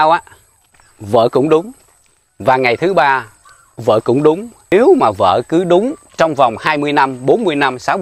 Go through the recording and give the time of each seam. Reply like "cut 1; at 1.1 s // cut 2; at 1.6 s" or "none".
cut 1; at 4.7 s